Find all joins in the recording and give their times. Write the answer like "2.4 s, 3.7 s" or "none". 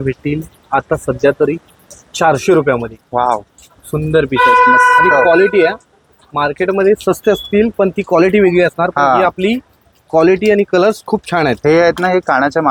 none